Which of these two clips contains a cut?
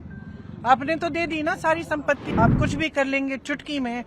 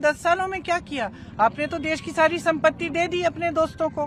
first; 1 cut; at 2.3 s

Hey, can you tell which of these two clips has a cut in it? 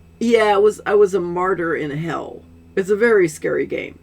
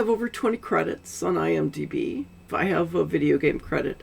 second; 1 cut; at 2.3 s

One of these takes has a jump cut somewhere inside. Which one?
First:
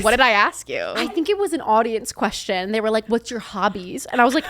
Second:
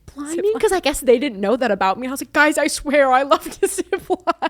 first; 1 cut; at 0.9 s

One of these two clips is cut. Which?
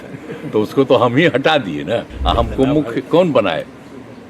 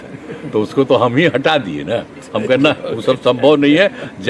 first; 1 cut; at 2.1 s

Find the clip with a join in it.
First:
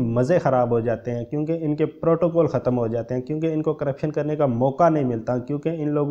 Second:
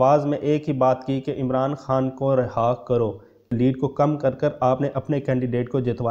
second; 1 cut; at 3.5 s

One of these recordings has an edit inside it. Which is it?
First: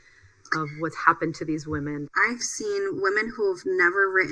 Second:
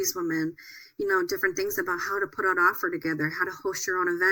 first; 1 cut; at 2.3 s

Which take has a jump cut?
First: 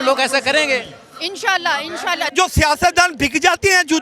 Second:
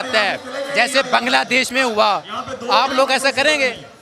first; 1 cut; at 2.3 s

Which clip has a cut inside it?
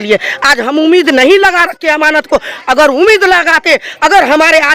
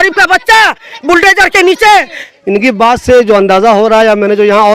second; 1 cut; at 2.1 s

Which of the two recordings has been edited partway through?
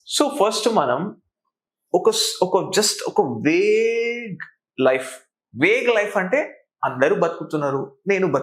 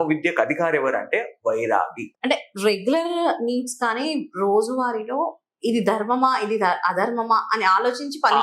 second; 1 cut; at 2.0 s

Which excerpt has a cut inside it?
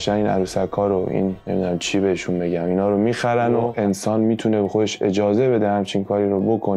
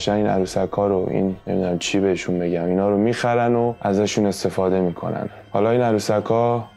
first; 1 cut; at 3.7 s

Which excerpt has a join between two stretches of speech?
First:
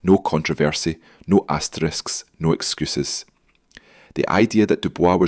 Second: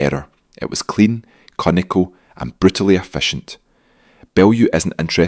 second; 1 cut; at 1.9 s

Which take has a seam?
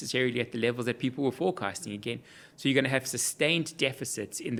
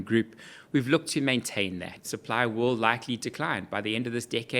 second; 1 cut; at 2.0 s

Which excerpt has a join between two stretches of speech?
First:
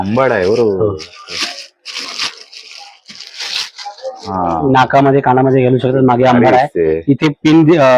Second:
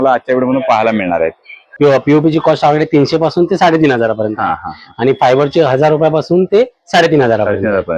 second; 1 cut; at 1.6 s

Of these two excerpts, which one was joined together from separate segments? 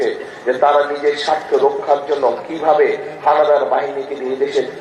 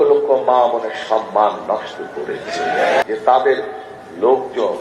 second; 1 cut; at 3.0 s

